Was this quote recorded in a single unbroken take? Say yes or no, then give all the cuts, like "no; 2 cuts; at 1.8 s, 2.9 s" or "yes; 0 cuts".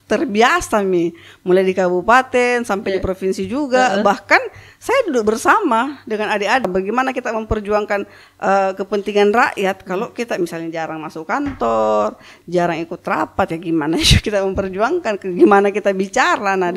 no; 1 cut; at 6.6 s